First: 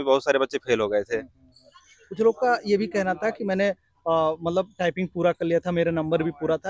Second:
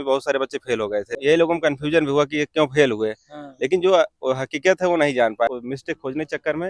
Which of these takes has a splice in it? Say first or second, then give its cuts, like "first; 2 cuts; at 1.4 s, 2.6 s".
second; 2 cuts; at 1.1 s, 5.5 s